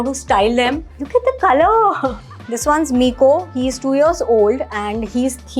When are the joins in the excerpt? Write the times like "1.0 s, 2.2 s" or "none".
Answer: 0.9 s, 2.3 s